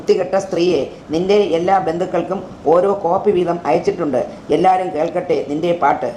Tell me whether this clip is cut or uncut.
uncut